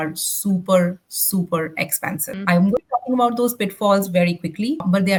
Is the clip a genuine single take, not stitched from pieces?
yes; 0 cuts

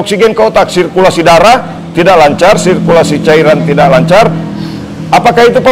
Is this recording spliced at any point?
no; 0 cuts

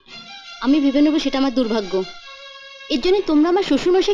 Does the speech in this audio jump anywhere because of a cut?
no; 0 cuts

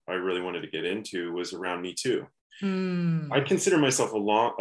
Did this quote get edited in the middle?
yes; 1 cut; at 2.4 s

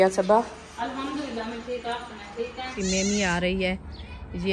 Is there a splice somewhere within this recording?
yes; 1 cut; at 2.8 s

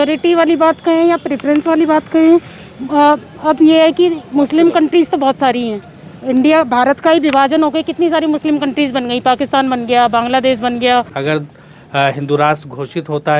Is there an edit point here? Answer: yes; 1 cut; at 11.1 s

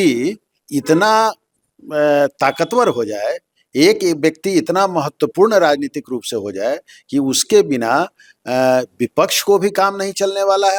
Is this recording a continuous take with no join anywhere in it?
yes; 0 cuts

